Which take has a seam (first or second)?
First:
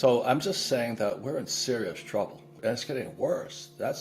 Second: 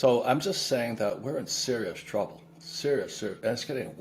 first